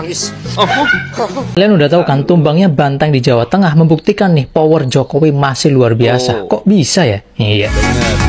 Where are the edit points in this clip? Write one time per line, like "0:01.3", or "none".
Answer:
0:01.6